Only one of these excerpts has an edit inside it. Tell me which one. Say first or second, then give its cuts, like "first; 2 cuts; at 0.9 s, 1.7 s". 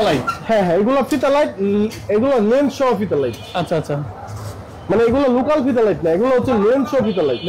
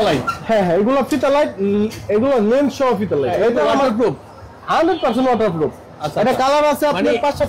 second; 1 cut; at 3.3 s